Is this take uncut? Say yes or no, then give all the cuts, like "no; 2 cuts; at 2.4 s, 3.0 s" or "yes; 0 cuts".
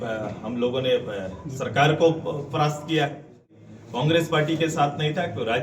no; 1 cut; at 3.5 s